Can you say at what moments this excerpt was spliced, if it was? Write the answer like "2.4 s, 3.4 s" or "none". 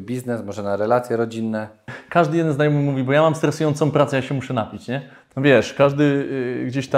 2.0 s, 5.1 s